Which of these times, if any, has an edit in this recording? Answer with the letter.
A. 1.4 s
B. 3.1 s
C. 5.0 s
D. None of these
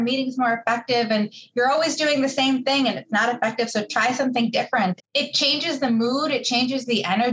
C